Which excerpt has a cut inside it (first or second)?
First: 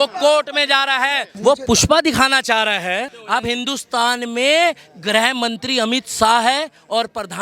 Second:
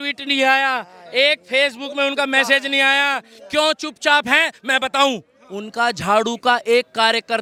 first